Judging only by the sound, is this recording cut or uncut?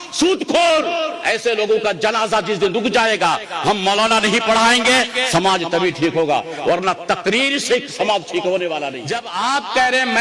cut